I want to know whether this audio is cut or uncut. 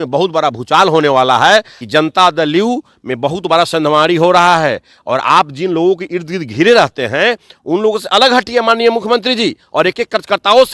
cut